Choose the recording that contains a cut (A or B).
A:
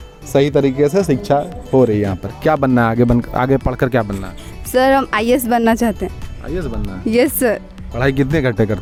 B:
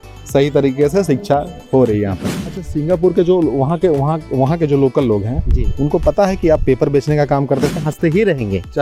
B